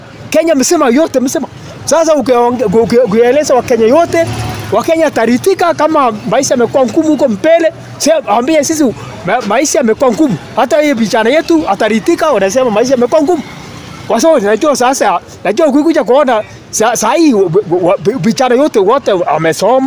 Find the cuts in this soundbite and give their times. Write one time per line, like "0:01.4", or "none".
none